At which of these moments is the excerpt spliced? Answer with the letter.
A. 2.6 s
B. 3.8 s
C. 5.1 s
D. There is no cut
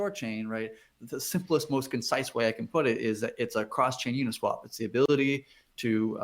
C